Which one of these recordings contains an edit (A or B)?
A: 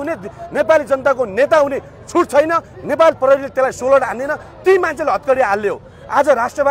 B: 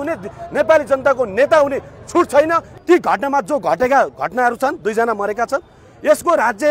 B